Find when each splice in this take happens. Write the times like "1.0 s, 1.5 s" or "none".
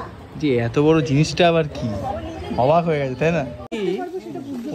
3.6 s